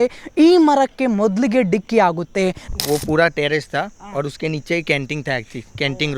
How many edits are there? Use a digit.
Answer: 1